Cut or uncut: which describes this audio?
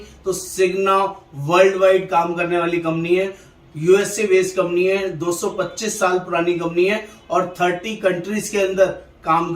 uncut